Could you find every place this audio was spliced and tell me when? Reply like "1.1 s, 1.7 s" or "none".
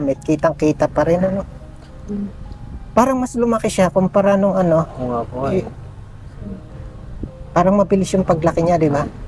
none